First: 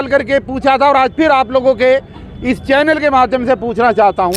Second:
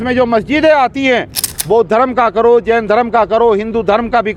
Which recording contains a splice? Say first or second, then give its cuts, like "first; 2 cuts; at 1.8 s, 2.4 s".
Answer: second; 1 cut; at 1.5 s